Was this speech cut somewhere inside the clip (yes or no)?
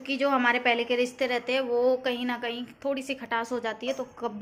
no